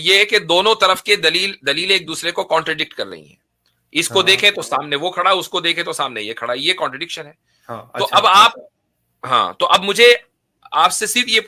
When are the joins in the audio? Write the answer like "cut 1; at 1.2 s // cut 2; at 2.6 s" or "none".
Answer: none